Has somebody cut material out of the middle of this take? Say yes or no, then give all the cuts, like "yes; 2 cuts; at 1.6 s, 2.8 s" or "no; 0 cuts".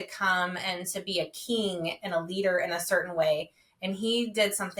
no; 0 cuts